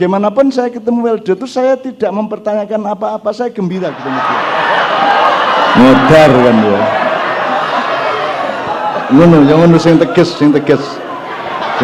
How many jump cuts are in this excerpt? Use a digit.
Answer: 1